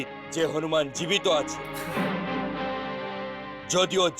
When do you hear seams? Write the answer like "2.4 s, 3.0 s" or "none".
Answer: 1.6 s